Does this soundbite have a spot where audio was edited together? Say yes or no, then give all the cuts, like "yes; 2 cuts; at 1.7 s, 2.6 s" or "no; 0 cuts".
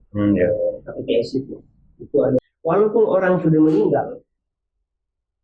yes; 1 cut; at 2.4 s